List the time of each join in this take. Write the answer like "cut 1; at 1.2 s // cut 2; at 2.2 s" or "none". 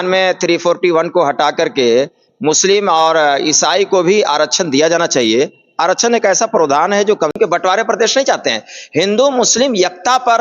cut 1; at 7.4 s